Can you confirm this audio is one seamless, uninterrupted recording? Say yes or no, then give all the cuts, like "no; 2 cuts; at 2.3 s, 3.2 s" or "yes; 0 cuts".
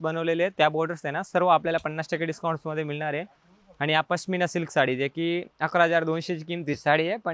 yes; 0 cuts